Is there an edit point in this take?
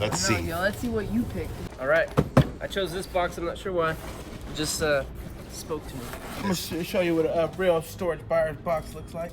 yes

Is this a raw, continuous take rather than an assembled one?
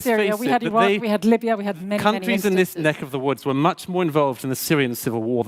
yes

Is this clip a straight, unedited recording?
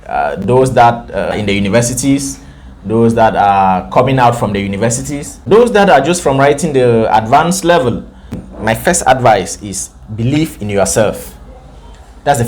no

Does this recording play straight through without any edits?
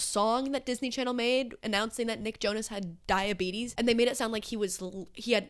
yes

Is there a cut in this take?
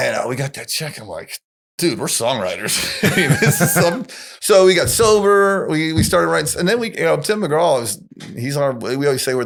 no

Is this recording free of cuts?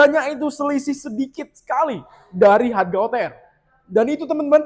yes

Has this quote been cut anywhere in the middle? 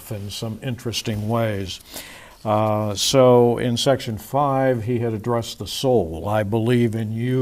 no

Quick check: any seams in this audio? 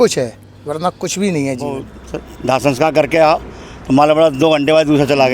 yes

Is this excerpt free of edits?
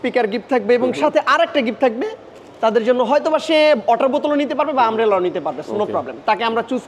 yes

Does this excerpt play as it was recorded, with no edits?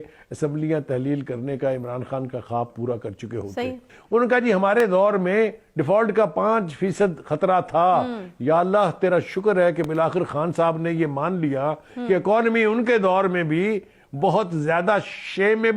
no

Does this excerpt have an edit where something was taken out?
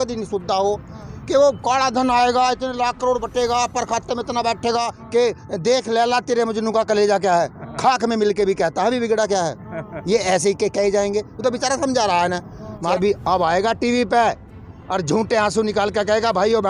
yes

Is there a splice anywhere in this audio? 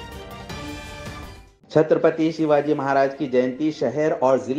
no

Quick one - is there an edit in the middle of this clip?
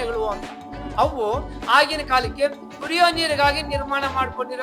no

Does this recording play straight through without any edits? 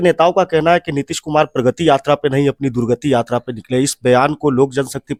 yes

